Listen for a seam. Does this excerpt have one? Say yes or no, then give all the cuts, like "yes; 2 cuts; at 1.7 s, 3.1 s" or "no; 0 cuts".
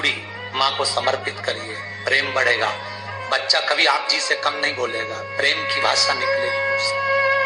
no; 0 cuts